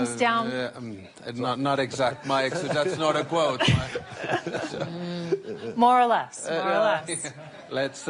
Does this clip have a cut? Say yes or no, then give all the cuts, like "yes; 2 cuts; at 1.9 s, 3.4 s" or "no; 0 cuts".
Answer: yes; 1 cut; at 4.9 s